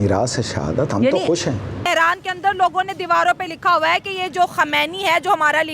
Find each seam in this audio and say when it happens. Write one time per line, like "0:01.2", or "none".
0:01.8